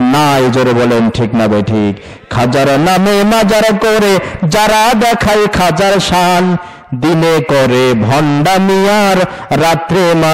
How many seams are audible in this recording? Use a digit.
0